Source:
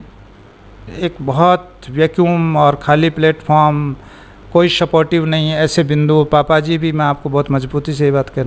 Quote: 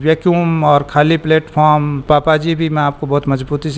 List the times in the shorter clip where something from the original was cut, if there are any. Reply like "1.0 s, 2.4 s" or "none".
2.0 s